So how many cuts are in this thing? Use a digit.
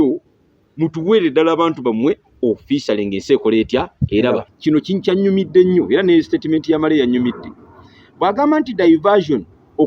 1